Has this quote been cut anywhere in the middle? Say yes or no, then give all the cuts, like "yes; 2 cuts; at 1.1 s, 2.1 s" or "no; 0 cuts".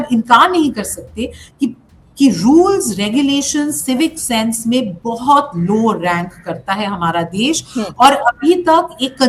no; 0 cuts